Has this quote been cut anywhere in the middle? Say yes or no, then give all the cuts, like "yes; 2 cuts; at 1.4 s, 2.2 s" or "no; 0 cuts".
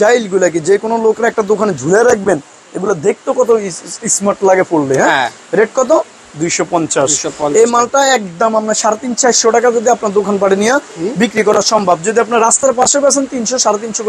no; 0 cuts